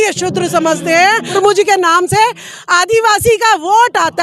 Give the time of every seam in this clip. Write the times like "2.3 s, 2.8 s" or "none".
1.3 s